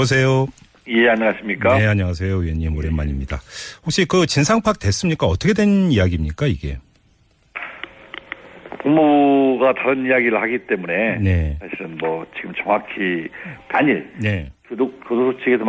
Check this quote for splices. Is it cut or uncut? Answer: uncut